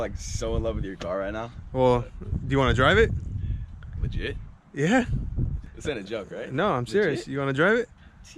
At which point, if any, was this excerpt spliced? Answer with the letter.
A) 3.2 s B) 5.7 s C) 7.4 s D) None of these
B